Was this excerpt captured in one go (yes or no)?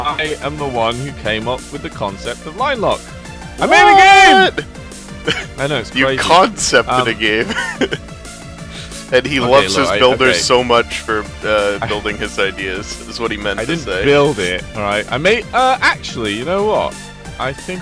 no